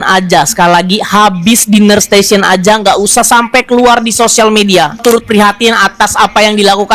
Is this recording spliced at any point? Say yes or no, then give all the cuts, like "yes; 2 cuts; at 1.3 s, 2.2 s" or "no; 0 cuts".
no; 0 cuts